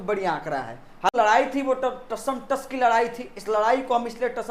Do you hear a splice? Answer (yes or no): yes